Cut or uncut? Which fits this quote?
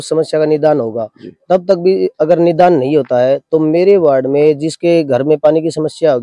uncut